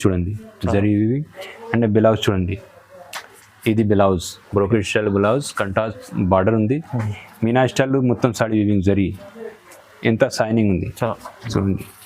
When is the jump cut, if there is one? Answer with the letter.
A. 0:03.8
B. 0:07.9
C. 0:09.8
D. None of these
D